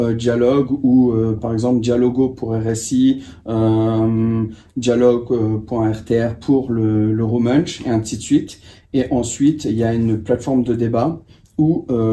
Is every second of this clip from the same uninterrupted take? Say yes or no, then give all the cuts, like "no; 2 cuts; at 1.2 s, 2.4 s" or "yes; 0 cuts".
yes; 0 cuts